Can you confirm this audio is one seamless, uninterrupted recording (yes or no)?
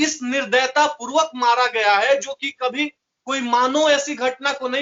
yes